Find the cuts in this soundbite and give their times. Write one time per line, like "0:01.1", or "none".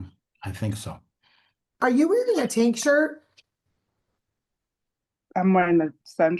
0:01.7